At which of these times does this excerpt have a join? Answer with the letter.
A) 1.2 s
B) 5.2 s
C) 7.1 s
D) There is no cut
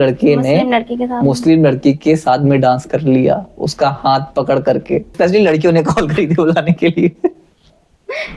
B